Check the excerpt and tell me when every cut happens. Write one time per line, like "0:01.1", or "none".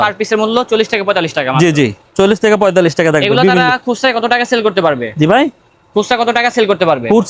none